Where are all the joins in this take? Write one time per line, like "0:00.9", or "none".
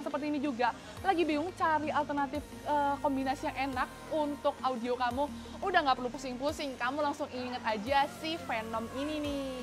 none